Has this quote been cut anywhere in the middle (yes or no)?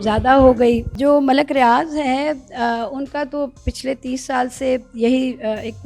no